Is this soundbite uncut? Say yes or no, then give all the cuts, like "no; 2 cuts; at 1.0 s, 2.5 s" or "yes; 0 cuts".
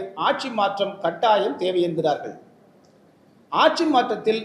yes; 0 cuts